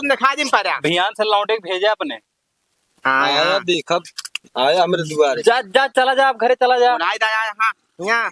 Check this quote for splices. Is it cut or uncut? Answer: uncut